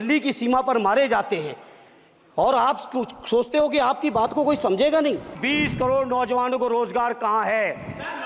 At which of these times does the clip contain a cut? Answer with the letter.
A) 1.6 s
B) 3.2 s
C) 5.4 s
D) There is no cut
C